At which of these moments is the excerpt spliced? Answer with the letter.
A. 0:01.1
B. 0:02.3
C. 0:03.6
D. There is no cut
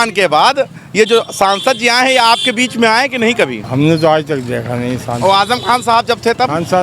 C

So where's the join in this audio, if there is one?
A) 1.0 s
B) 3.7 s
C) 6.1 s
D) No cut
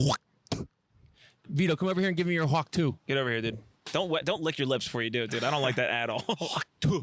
B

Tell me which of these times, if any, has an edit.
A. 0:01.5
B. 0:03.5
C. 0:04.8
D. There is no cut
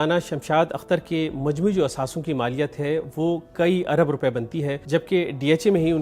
C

